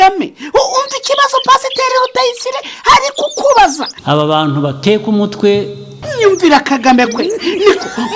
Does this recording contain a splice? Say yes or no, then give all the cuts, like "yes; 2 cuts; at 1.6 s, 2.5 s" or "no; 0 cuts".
yes; 2 cuts; at 4.0 s, 6.0 s